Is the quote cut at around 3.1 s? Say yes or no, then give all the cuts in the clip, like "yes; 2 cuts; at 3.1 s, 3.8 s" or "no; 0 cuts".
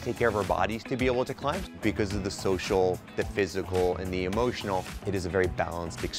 no; 2 cuts; at 1.3 s, 4.9 s